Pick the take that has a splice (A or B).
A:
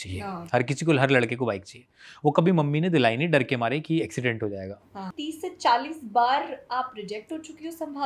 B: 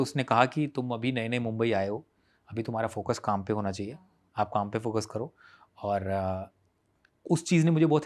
A